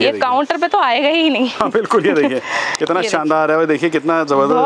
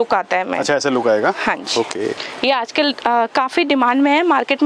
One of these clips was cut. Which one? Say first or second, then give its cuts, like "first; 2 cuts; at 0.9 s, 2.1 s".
second; 1 cut; at 2.3 s